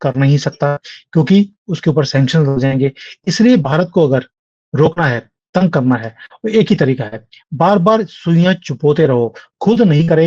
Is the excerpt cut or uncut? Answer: uncut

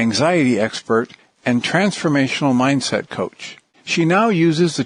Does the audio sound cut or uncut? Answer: uncut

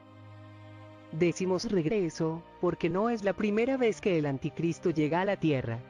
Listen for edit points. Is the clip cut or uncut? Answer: uncut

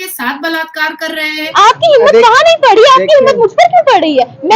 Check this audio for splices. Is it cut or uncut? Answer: cut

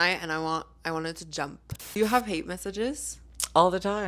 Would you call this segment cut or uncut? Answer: cut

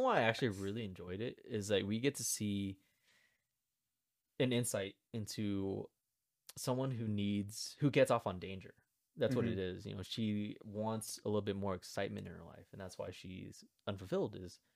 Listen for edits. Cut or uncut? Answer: uncut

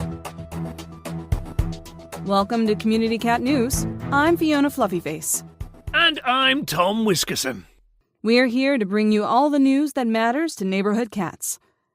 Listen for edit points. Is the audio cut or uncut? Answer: cut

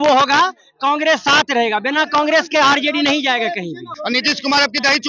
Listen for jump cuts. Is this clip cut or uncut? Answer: cut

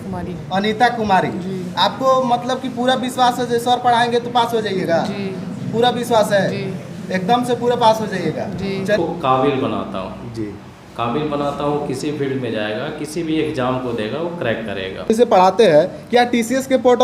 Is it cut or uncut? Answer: cut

